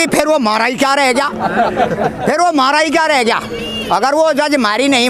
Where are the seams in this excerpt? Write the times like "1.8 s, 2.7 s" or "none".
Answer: none